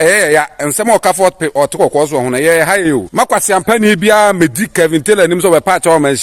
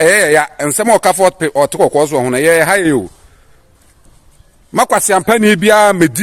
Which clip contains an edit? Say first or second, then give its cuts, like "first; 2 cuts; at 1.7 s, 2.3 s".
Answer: first; 1 cut; at 3.1 s